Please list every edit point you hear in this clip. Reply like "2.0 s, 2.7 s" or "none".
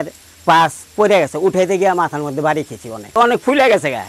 3.2 s